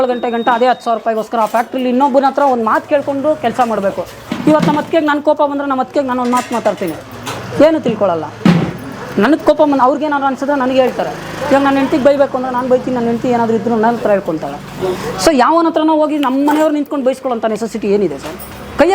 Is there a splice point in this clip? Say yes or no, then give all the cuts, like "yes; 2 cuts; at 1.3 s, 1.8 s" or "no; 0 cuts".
no; 0 cuts